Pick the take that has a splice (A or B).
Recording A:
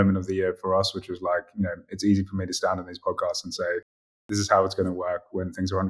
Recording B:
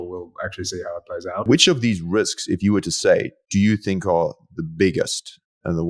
B